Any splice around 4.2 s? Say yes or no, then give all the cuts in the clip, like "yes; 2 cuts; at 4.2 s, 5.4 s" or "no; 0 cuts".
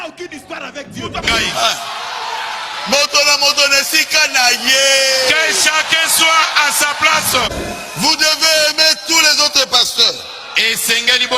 no; 2 cuts; at 1.2 s, 7.5 s